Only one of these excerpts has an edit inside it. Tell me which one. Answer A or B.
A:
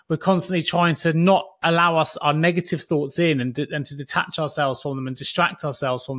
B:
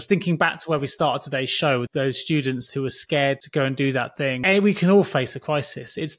B